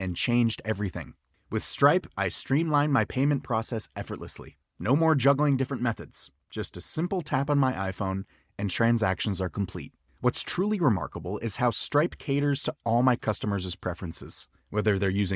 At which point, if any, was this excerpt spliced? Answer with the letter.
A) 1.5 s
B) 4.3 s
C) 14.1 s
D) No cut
D